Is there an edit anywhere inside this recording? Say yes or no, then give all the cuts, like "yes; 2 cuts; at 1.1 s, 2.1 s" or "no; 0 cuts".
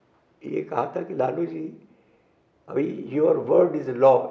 no; 0 cuts